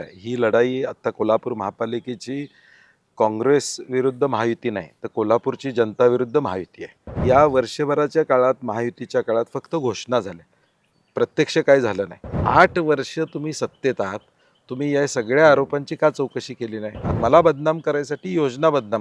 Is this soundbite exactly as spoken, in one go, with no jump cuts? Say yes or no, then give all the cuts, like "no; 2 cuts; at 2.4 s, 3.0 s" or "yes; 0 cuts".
no; 3 cuts; at 7.2 s, 12.4 s, 17.1 s